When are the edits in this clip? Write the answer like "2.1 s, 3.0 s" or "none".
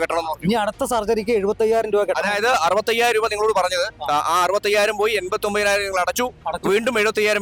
none